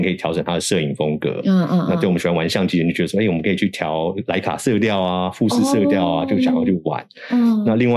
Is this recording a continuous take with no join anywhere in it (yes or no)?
yes